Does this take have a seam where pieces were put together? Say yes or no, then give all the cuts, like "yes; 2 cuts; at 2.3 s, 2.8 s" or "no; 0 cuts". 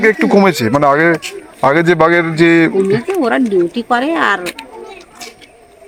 no; 0 cuts